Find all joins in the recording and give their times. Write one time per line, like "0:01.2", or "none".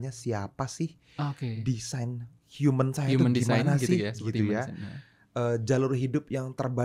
none